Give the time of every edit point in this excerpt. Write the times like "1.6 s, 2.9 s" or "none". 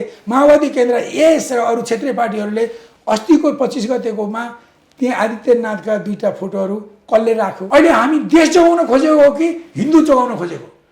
7.6 s